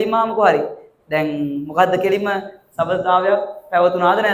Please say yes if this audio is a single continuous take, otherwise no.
yes